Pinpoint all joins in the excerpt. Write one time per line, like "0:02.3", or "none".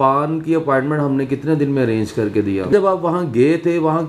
0:02.7